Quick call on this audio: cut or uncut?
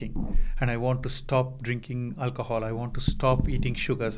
uncut